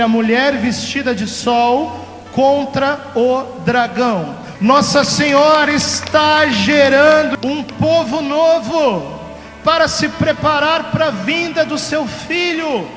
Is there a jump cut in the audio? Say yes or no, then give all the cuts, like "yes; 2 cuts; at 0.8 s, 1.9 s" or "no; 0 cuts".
yes; 2 cuts; at 4.4 s, 7.3 s